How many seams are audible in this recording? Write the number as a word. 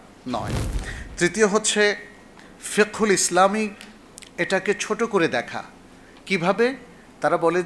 zero